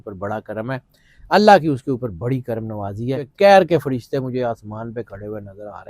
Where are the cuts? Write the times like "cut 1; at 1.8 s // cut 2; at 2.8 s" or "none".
cut 1; at 3.2 s